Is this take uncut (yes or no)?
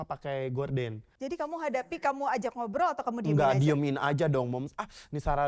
no